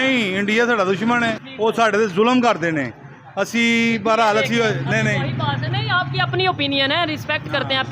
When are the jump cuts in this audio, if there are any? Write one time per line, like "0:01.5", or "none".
0:01.4